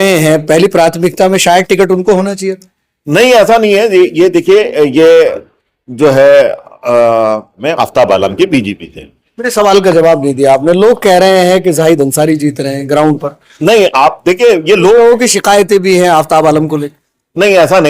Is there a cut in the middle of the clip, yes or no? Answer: yes